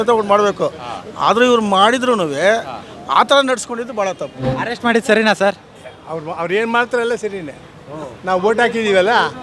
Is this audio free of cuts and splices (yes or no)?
no